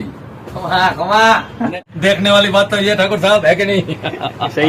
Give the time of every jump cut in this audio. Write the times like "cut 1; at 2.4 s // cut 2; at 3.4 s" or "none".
cut 1; at 1.7 s